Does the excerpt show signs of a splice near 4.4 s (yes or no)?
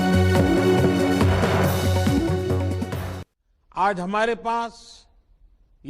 no